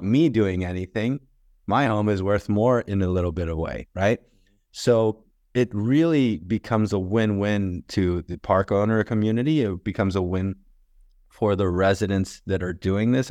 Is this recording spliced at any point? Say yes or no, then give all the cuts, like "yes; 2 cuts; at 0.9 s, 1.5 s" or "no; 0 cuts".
no; 0 cuts